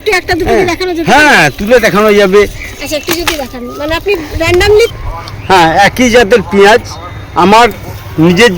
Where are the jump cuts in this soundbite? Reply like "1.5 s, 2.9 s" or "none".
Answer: 4.9 s